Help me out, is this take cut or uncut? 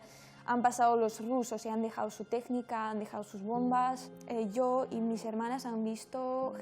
cut